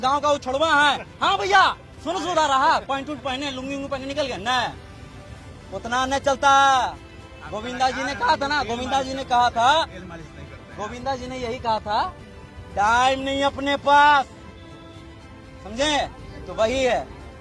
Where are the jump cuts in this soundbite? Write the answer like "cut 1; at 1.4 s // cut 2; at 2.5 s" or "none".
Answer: none

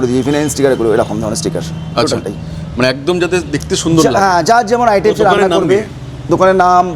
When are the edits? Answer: none

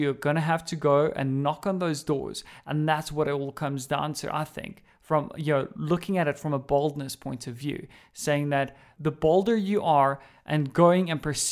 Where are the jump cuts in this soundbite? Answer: cut 1; at 8.9 s

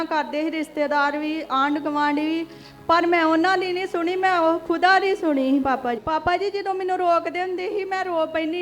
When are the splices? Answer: cut 1; at 6.0 s

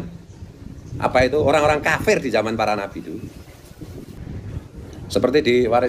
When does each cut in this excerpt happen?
cut 1; at 4.1 s

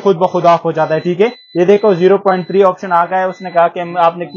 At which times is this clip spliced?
none

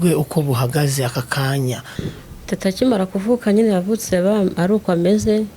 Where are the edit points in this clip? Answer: cut 1; at 1.9 s

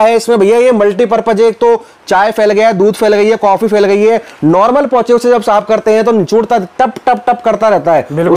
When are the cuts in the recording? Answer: none

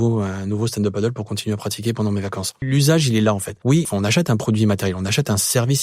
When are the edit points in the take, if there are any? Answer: cut 1; at 2.6 s // cut 2; at 3.8 s

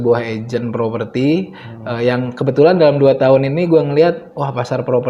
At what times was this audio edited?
none

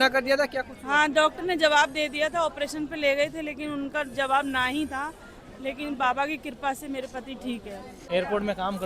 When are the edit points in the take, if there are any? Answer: cut 1; at 8.0 s

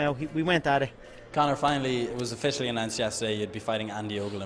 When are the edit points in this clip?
cut 1; at 1.8 s

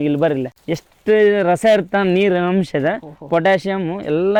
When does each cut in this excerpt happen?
none

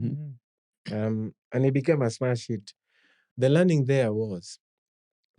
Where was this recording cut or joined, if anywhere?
cut 1; at 3.2 s

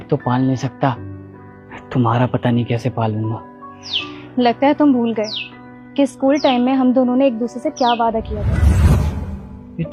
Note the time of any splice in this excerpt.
cut 1; at 8.7 s

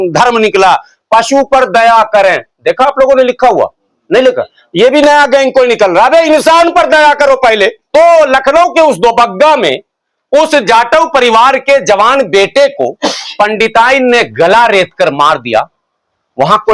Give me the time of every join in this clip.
cut 1; at 7.8 s

